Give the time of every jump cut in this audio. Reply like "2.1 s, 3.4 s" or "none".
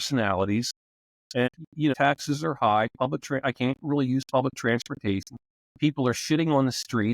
1.9 s